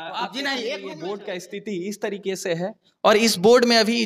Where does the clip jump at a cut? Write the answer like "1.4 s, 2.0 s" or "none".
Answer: 0.9 s